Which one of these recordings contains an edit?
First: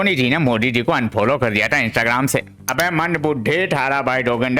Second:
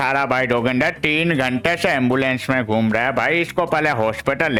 first; 1 cut; at 2.6 s

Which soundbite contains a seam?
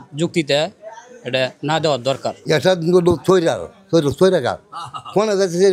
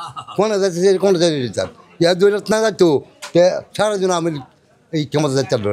first; 1 cut; at 2.4 s

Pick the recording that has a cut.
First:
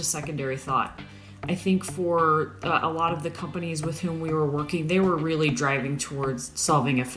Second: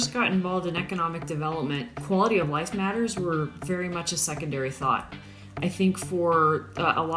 second; 1 cut; at 1.9 s

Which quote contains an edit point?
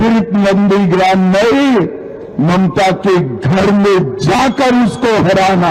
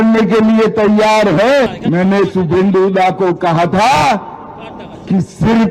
second; 1 cut; at 1.7 s

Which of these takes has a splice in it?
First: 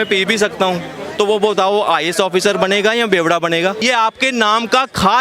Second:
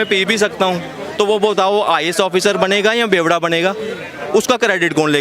first; 1 cut; at 3.8 s

